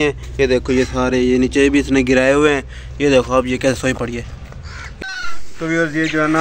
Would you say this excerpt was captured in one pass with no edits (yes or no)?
no